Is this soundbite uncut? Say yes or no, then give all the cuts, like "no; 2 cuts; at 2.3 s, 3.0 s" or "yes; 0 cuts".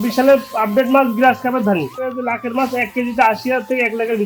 no; 1 cut; at 2.0 s